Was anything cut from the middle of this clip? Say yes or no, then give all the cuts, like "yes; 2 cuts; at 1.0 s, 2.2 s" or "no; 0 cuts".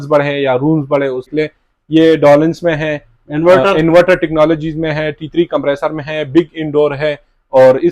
yes; 1 cut; at 1.3 s